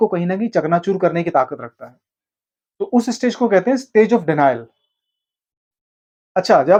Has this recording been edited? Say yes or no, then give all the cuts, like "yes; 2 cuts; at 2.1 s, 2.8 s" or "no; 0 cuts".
no; 0 cuts